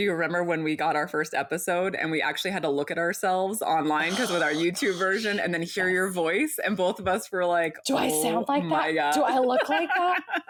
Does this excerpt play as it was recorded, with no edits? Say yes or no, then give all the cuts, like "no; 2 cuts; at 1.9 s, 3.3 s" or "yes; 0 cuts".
yes; 0 cuts